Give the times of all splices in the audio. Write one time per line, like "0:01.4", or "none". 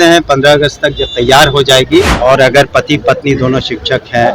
0:02.1